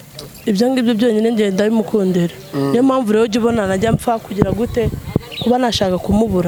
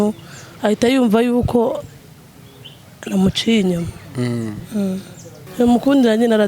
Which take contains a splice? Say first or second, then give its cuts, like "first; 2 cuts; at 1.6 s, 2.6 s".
second; 1 cut; at 5.4 s